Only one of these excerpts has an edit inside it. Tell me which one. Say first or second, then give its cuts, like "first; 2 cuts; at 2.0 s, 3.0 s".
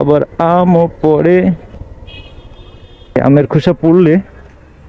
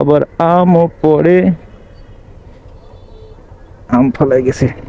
first; 2 cuts; at 1.7 s, 3.2 s